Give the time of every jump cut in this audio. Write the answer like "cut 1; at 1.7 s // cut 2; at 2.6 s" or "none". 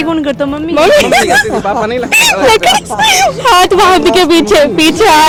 none

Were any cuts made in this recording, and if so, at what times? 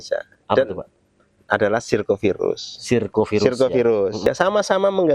cut 1; at 4.2 s

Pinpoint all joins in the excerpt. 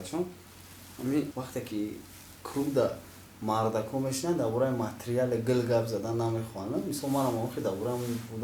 cut 1; at 1.3 s

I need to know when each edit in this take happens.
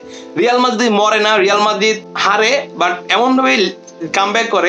cut 1; at 2.1 s

